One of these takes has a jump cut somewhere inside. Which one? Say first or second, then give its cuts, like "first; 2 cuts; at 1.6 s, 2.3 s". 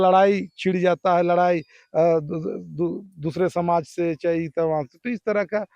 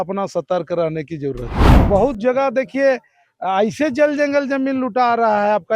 second; 1 cut; at 1.7 s